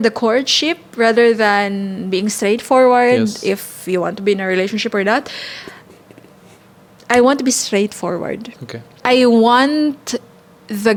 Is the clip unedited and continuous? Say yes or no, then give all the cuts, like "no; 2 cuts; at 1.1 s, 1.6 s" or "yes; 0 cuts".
yes; 0 cuts